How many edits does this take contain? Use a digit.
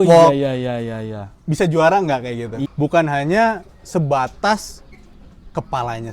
1